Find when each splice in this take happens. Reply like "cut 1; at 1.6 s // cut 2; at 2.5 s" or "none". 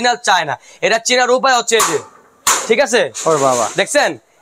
none